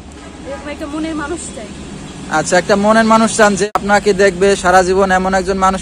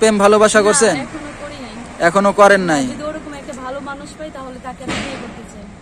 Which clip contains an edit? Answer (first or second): first